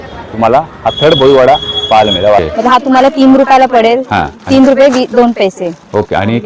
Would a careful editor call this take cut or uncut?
cut